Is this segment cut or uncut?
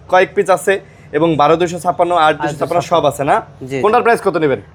uncut